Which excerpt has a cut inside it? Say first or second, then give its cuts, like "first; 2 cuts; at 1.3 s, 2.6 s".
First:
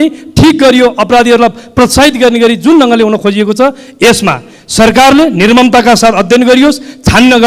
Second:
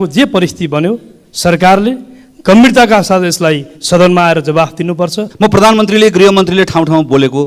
second; 1 cut; at 5.2 s